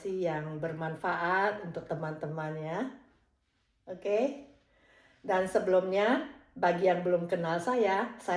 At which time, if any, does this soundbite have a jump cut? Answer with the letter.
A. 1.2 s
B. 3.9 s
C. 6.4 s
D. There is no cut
D